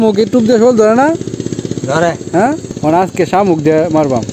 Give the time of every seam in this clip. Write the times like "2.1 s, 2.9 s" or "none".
2.7 s